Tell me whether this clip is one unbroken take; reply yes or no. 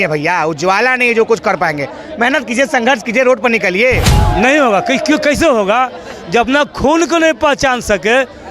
no